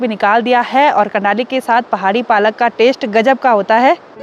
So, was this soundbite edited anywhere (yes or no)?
no